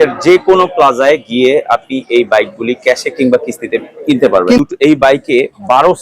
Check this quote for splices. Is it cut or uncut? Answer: cut